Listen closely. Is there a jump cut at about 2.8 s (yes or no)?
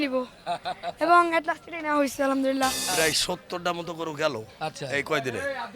yes